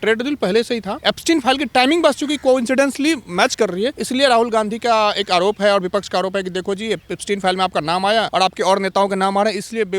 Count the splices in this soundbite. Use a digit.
3